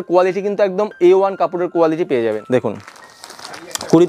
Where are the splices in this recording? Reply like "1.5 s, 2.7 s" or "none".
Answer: 2.4 s